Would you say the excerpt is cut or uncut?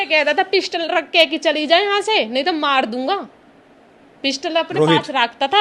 uncut